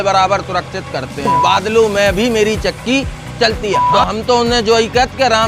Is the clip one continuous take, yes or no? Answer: no